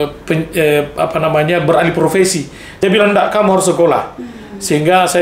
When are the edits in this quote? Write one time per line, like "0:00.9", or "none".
0:02.8